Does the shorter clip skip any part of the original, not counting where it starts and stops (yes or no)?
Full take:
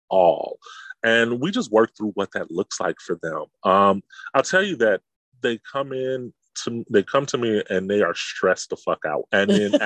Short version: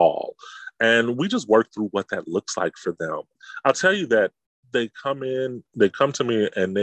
yes